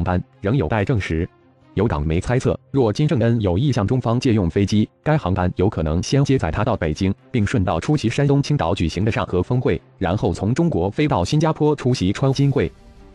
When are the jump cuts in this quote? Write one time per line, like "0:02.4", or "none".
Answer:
none